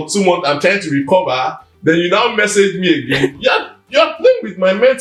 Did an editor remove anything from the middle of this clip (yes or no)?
no